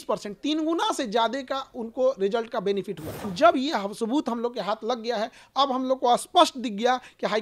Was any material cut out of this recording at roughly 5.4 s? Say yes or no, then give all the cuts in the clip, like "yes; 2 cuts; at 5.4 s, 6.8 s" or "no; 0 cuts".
no; 1 cut; at 3.3 s